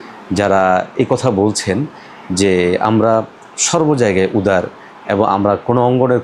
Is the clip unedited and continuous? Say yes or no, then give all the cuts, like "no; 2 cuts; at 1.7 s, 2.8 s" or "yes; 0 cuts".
yes; 0 cuts